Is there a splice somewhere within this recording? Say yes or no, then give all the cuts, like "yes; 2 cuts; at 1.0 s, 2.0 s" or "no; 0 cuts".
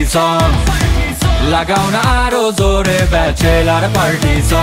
no; 0 cuts